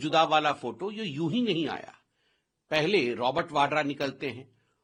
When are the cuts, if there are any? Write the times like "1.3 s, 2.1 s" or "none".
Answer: none